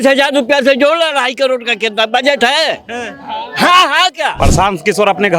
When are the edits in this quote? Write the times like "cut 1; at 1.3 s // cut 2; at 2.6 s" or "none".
cut 1; at 4.3 s